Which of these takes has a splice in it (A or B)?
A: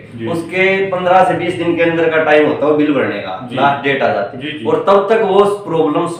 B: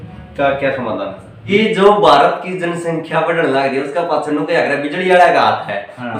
B